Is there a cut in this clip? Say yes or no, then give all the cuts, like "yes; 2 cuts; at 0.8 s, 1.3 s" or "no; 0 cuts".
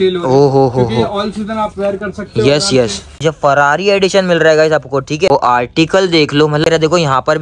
yes; 3 cuts; at 3.2 s, 5.3 s, 6.6 s